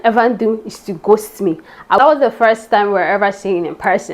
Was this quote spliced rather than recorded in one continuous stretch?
yes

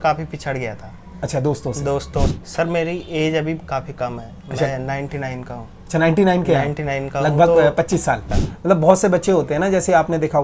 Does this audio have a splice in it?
yes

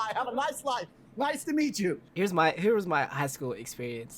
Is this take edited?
yes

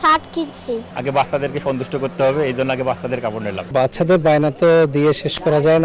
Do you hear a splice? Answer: yes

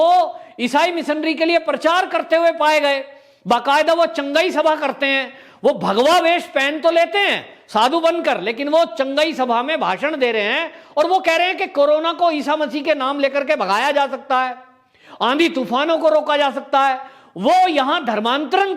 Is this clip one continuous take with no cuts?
yes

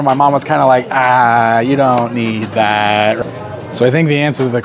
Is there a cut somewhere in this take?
yes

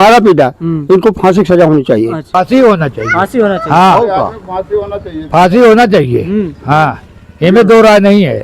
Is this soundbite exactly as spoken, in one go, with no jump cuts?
no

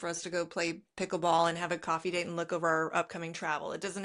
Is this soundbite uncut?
yes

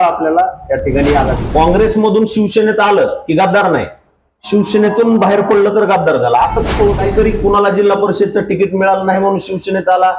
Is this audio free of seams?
no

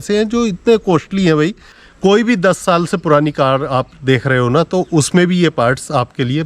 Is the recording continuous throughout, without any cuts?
no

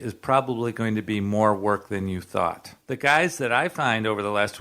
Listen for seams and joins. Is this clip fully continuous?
no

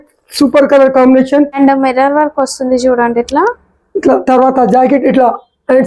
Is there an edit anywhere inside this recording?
yes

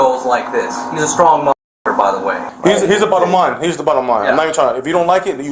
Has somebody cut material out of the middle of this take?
yes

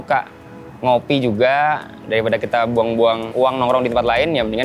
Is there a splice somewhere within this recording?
yes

